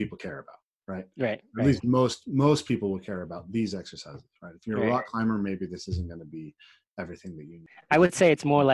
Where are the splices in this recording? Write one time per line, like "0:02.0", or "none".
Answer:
0:07.7